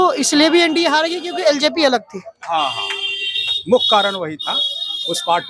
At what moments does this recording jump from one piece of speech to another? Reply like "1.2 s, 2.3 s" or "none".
none